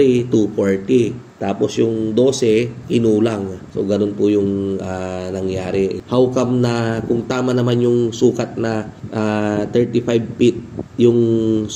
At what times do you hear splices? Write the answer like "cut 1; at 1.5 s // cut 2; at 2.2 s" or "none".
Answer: none